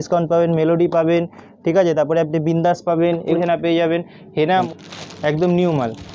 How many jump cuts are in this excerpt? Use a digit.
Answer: 2